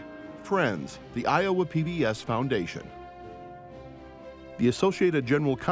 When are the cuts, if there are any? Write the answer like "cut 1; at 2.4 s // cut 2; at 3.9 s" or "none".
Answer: cut 1; at 2.8 s // cut 2; at 4.6 s